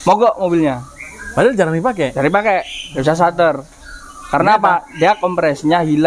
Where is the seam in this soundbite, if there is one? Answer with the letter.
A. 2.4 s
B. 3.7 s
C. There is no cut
C